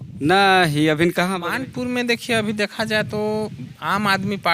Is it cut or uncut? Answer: cut